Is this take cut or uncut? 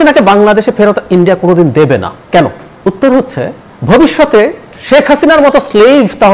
uncut